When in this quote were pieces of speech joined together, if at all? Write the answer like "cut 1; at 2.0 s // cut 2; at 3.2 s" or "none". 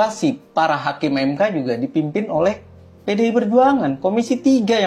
none